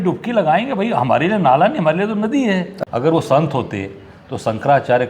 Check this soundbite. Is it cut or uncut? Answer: cut